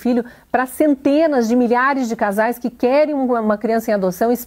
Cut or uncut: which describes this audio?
uncut